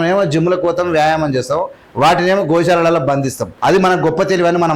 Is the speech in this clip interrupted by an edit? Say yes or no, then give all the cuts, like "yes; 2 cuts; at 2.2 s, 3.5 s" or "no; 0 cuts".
yes; 1 cut; at 3.4 s